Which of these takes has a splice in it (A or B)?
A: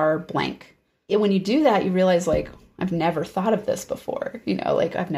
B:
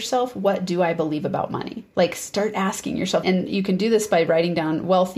A